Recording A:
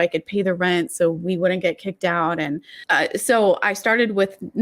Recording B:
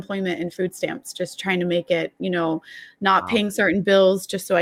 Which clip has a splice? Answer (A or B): A